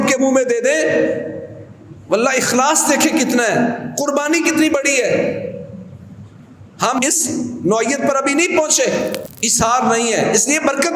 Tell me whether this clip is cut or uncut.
cut